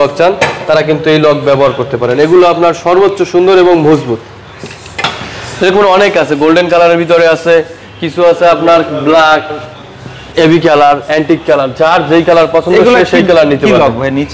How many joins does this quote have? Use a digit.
0